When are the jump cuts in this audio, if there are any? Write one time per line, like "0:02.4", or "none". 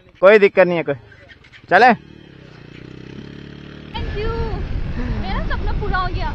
0:03.9